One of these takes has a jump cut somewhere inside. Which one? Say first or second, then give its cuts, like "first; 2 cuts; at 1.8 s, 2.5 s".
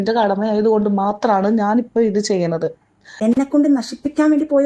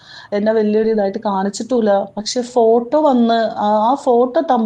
first; 1 cut; at 3.1 s